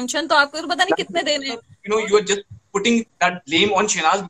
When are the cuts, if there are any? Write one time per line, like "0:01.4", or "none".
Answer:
0:01.7